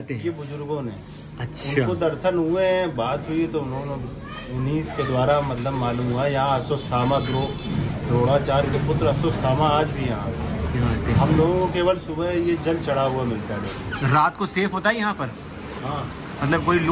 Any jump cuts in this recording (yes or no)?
no